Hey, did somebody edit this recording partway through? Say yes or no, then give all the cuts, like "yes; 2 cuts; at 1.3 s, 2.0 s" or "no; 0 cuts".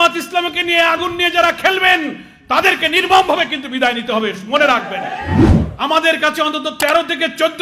yes; 1 cut; at 5.3 s